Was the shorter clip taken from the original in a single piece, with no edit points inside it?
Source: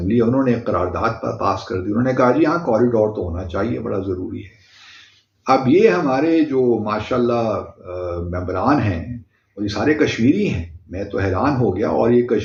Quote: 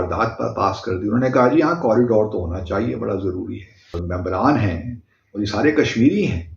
no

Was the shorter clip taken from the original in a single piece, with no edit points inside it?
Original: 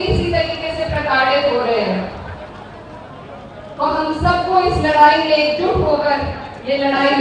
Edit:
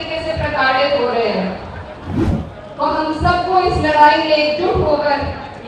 no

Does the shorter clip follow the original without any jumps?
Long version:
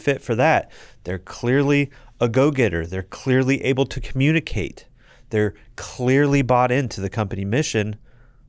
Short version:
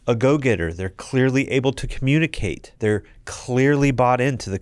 no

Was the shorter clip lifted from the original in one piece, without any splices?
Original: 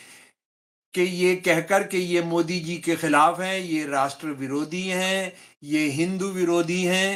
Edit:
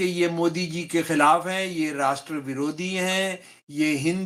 yes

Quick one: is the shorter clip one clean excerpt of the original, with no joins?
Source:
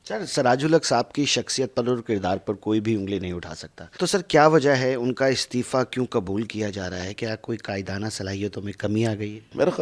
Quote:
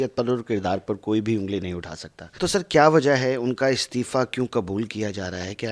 yes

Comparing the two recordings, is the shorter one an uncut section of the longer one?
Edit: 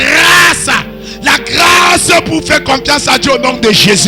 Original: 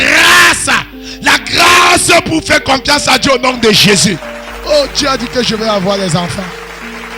yes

